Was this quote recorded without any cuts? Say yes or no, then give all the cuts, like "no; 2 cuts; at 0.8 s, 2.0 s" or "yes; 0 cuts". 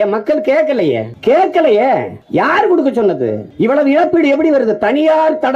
no; 3 cuts; at 1.1 s, 2.2 s, 3.4 s